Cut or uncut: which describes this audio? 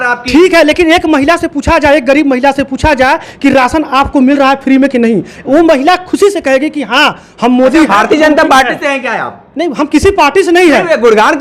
uncut